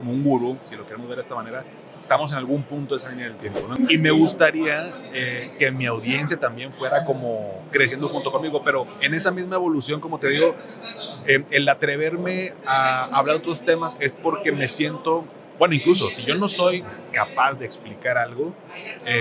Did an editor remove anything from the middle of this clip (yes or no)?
yes